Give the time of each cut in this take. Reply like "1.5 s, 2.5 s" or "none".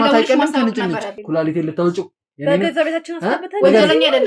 1.2 s